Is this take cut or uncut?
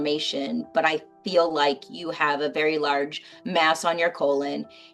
uncut